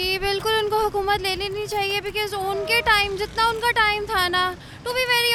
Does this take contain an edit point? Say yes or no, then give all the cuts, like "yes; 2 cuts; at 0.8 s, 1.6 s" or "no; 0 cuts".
no; 0 cuts